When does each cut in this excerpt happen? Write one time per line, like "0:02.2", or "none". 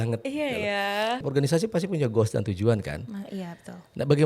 0:01.2